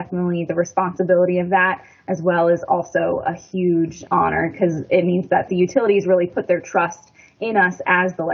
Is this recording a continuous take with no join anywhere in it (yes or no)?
no